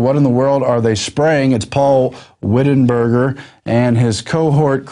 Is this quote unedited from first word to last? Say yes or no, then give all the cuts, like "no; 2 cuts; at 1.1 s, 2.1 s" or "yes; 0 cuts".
yes; 0 cuts